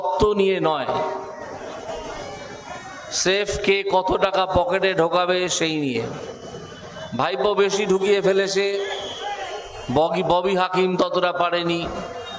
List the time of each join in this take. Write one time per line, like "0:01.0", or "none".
none